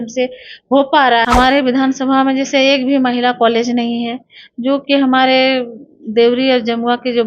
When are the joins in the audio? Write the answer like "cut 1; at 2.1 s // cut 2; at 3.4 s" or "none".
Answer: cut 1; at 1.2 s